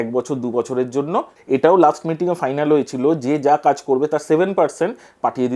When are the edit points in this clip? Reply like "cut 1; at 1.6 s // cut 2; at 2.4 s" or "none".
cut 1; at 1.4 s